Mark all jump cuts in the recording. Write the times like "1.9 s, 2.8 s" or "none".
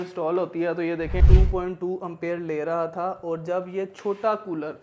1.2 s